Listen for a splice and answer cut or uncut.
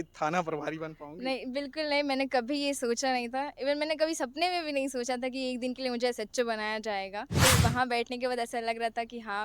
cut